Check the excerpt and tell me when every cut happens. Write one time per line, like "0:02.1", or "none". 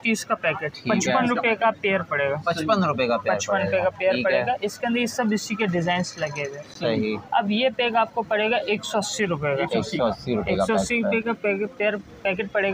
none